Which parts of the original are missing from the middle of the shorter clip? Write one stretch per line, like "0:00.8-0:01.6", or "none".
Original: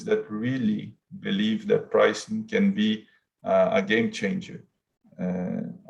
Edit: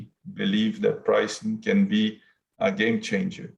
0:03.5-0:03.7